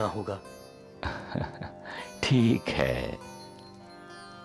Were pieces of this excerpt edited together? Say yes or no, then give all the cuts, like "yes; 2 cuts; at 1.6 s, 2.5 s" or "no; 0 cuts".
no; 0 cuts